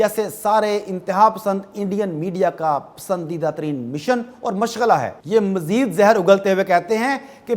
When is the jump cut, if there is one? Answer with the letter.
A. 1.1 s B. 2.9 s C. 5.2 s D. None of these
C